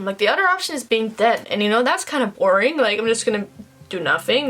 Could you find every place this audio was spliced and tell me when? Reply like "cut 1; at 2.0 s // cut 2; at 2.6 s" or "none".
none